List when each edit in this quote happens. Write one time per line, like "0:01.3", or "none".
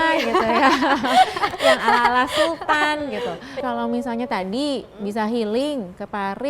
0:03.6